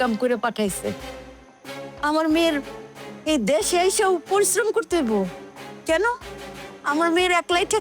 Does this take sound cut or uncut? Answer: uncut